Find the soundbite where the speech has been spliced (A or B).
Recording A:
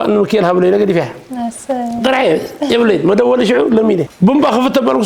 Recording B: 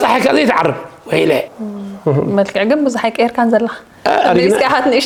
A